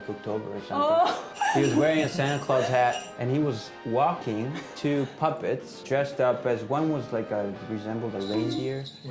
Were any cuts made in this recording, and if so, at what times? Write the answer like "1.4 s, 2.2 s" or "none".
1.3 s, 4.6 s, 5.8 s